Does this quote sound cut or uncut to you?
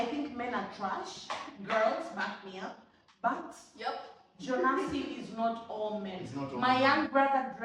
uncut